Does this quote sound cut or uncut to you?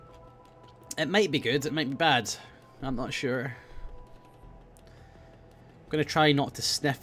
uncut